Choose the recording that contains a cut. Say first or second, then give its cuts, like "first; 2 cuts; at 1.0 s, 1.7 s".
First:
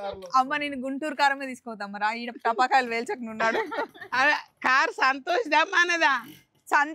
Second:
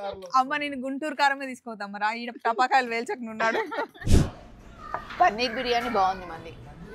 second; 1 cut; at 4.0 s